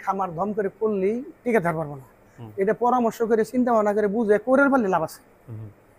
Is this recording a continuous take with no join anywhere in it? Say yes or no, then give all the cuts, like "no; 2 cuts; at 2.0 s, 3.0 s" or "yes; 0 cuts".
yes; 0 cuts